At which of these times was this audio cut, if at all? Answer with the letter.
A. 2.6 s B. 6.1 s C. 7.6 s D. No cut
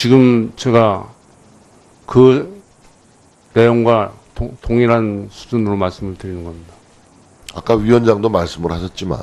D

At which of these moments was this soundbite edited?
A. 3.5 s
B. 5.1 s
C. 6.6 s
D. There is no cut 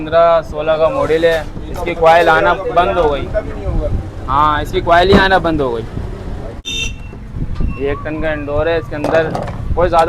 C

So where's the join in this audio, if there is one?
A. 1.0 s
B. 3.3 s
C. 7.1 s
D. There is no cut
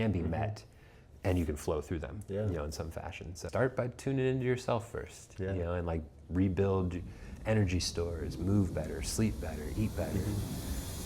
B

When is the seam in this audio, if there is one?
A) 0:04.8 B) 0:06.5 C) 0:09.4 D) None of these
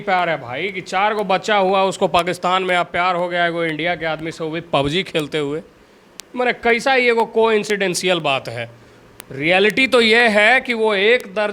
D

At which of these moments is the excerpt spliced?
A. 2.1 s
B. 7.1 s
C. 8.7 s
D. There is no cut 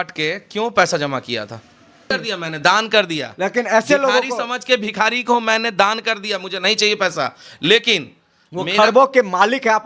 A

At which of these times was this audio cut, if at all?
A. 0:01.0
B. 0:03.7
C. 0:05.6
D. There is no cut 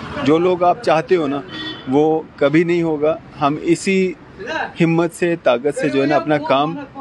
D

